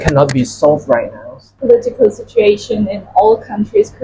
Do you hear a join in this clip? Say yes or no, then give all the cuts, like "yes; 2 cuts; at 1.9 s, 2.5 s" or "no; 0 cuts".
yes; 1 cut; at 1.5 s